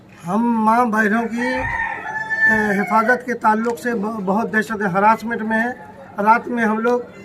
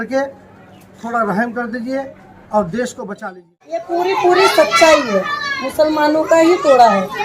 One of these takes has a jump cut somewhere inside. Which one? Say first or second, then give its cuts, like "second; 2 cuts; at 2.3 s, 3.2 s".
second; 1 cut; at 3.9 s